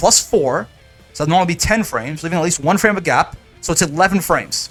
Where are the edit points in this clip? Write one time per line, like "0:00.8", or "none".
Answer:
none